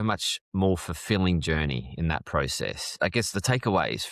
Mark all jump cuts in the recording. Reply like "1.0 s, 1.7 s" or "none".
2.8 s